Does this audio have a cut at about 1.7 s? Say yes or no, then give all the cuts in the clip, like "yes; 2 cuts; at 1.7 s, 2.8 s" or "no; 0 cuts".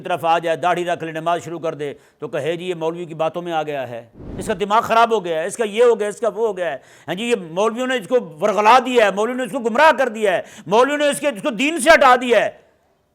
no; 1 cut; at 4.3 s